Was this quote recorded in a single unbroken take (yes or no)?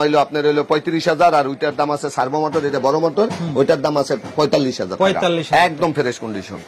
yes